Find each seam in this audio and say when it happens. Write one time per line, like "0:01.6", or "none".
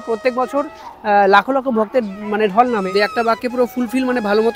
0:02.9